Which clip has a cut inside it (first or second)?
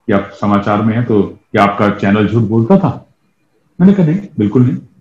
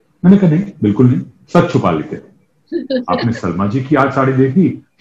second